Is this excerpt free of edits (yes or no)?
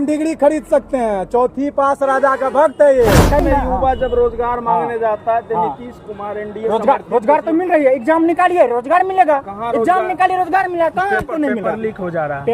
no